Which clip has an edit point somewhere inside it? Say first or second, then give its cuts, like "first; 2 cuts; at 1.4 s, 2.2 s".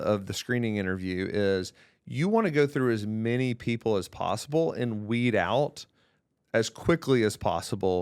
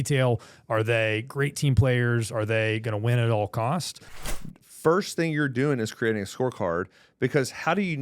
second; 1 cut; at 4.1 s